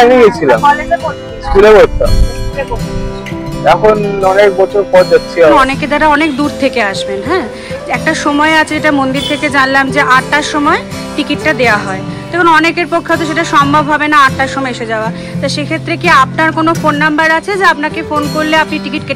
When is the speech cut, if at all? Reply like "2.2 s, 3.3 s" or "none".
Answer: 5.5 s